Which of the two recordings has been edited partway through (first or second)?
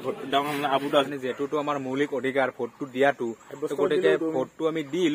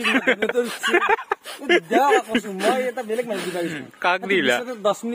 first